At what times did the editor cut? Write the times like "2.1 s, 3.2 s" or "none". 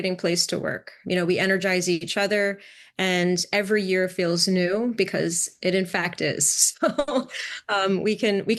0.9 s